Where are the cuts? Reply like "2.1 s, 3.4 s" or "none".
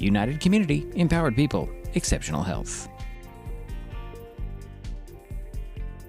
2.6 s